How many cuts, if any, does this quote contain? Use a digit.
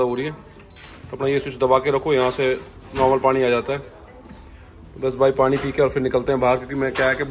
0